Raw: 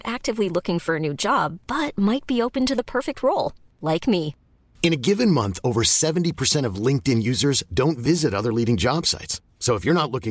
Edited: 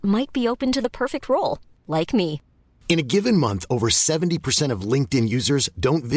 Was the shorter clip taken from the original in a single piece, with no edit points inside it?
yes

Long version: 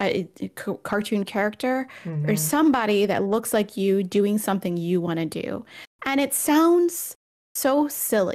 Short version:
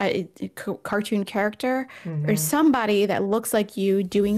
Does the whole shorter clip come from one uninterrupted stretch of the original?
yes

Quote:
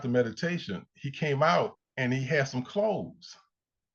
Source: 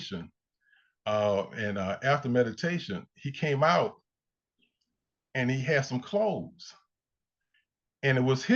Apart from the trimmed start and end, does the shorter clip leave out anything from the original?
yes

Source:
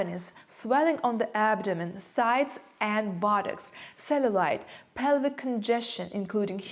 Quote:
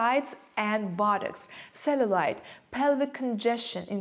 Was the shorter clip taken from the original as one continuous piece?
yes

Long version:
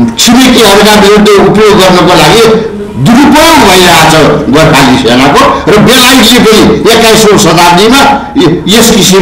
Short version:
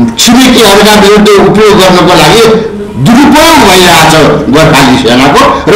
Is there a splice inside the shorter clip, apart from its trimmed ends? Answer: no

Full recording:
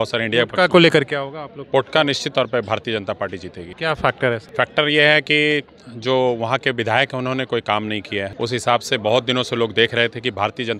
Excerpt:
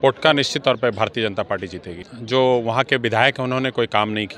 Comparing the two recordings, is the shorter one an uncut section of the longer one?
no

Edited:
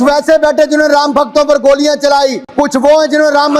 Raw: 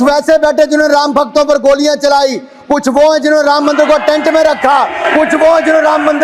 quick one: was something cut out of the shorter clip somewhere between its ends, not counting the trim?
yes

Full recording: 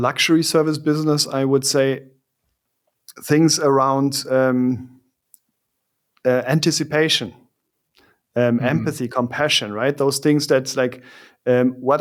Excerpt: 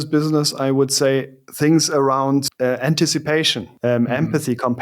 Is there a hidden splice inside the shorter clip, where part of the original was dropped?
yes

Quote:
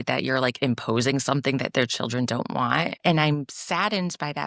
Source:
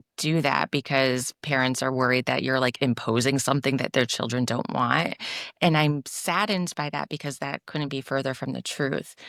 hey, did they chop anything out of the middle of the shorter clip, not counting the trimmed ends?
yes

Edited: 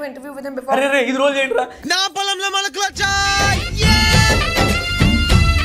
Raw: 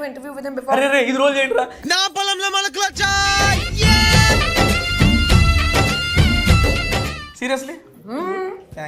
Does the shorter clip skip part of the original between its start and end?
no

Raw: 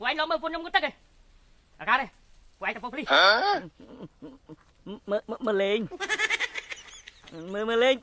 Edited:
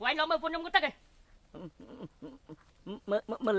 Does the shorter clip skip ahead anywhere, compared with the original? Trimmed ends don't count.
yes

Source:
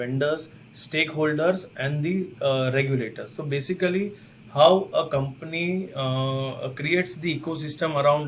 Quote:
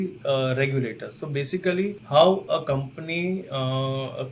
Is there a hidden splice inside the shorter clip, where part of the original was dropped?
yes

